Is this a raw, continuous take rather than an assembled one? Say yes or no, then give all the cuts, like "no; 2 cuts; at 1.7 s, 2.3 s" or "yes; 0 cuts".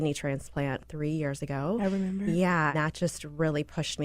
no; 1 cut; at 2.7 s